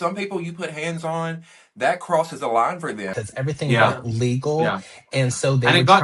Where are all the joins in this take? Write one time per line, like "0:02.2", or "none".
0:03.1